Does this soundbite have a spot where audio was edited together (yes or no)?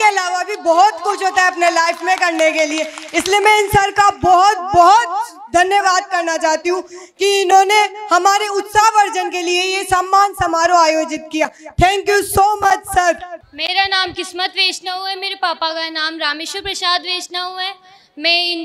no